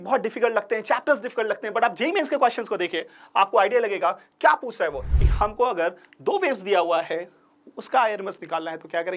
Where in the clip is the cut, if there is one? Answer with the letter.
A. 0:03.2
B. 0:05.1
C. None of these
B